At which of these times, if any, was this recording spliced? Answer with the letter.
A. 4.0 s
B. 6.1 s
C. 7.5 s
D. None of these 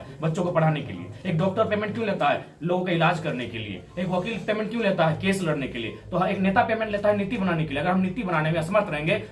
D